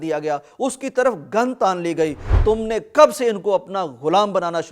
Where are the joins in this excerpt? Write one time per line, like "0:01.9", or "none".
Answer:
0:02.3